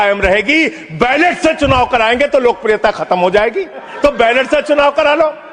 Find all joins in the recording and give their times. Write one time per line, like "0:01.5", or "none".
0:03.9